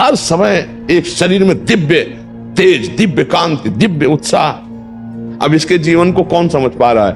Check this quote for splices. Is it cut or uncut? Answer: cut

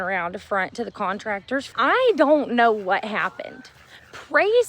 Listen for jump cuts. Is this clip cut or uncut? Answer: cut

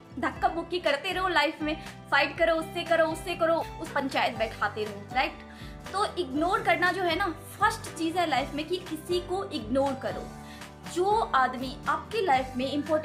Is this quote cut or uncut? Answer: uncut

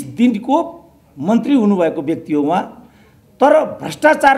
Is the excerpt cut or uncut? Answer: uncut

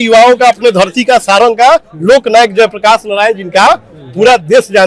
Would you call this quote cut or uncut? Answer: uncut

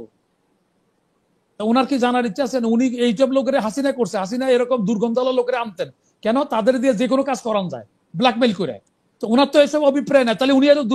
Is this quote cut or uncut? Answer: uncut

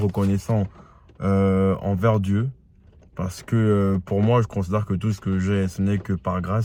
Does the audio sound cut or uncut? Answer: uncut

